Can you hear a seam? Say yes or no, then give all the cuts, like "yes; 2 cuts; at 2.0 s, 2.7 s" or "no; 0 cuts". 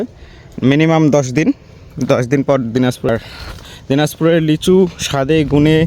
yes; 1 cut; at 3.1 s